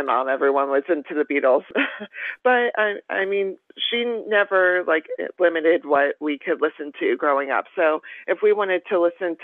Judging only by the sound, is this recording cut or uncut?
cut